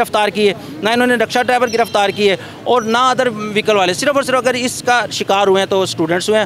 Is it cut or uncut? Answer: uncut